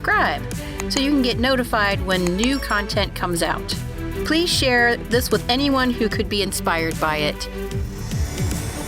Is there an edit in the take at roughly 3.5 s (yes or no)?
no